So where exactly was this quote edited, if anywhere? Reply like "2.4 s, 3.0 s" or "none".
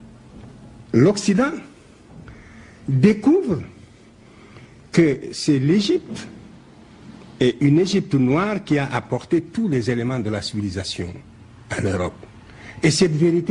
none